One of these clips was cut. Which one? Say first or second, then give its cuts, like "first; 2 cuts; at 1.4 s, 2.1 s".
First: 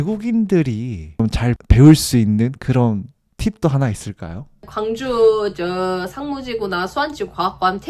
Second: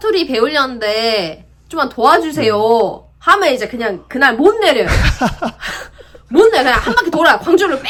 first; 1 cut; at 4.7 s